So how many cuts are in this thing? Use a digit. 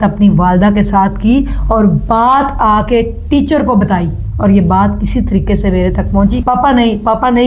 1